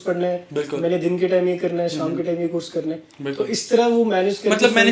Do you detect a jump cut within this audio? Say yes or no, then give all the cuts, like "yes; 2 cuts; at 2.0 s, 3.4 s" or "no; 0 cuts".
no; 0 cuts